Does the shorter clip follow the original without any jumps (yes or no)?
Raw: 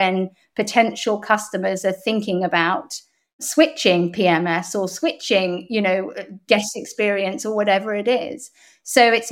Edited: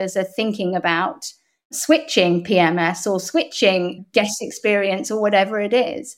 no